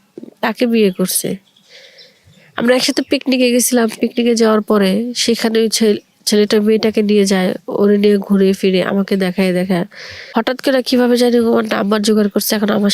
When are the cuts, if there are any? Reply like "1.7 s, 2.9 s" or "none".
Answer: 10.1 s